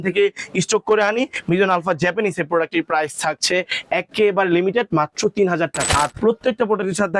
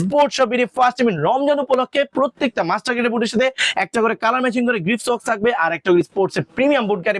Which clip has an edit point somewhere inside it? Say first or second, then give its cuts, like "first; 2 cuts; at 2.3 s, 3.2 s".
first; 1 cut; at 5.9 s